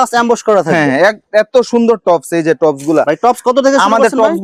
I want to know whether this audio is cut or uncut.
uncut